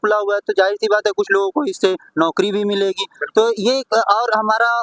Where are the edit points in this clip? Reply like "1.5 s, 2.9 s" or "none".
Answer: none